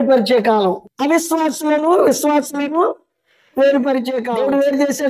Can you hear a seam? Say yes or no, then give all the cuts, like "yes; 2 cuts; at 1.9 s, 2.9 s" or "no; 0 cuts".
yes; 1 cut; at 4.2 s